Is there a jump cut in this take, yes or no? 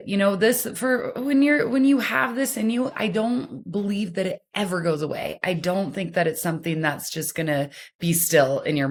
no